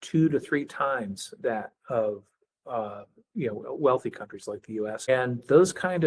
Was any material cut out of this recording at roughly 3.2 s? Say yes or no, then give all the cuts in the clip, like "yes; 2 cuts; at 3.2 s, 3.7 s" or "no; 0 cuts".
no; 1 cut; at 5.1 s